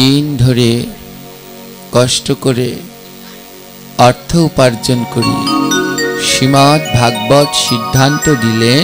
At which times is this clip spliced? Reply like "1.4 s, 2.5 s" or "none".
none